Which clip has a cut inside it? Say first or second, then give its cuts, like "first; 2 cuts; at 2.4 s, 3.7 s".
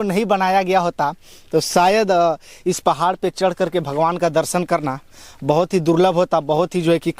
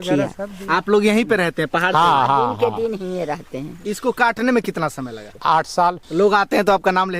second; 3 cuts; at 3.8 s, 5.2 s, 6.0 s